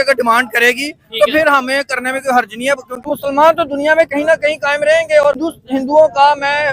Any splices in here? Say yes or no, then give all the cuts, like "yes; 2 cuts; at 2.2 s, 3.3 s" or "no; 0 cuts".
yes; 2 cuts; at 2.9 s, 5.4 s